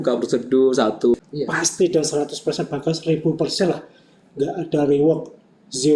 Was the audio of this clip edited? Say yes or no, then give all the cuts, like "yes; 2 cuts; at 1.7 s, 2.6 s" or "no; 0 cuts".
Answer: yes; 1 cut; at 1.1 s